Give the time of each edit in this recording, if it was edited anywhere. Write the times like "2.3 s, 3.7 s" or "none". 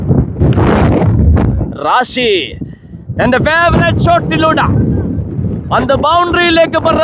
none